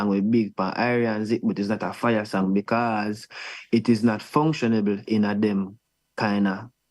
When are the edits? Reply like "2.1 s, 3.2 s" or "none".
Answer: none